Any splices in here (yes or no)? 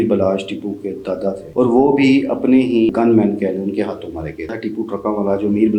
yes